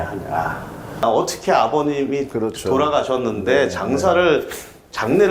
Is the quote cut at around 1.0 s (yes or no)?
yes